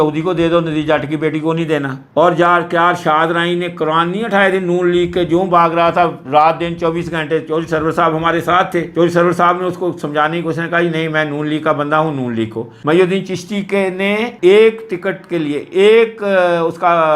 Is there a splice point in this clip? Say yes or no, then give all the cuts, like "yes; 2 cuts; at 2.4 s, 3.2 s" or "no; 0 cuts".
no; 0 cuts